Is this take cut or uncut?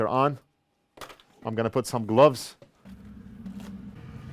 cut